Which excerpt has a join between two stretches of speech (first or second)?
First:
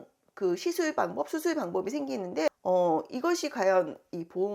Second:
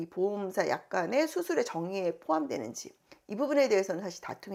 first